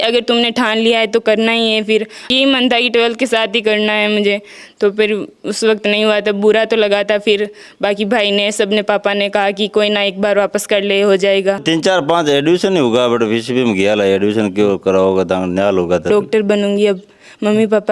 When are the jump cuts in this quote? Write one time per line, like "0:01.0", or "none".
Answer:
0:02.3
0:11.6
0:16.0